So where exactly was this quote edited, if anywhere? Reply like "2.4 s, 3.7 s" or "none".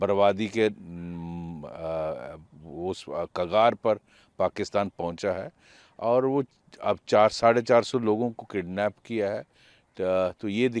none